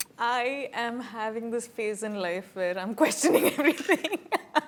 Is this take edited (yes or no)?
no